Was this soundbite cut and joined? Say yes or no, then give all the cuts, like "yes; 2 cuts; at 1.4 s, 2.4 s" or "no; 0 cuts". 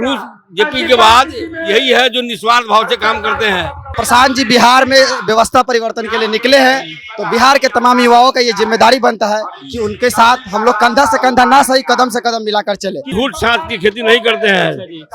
yes; 2 cuts; at 3.9 s, 13.1 s